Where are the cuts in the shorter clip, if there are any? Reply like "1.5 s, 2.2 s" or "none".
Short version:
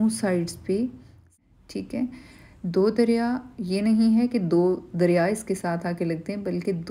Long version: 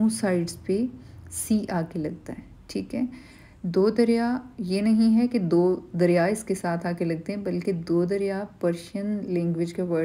1.3 s